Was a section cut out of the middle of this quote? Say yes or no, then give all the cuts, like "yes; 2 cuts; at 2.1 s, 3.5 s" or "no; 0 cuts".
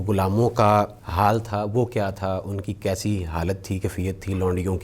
yes; 1 cut; at 1.0 s